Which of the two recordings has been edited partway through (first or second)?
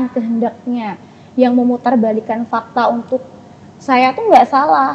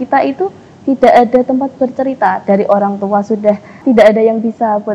second